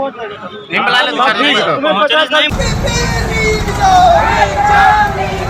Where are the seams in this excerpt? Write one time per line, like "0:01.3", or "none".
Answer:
0:02.5